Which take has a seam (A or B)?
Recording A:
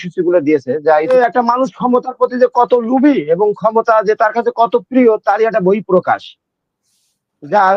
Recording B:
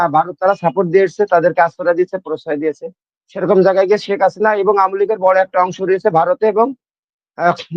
A